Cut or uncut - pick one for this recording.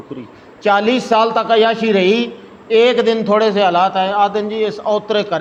uncut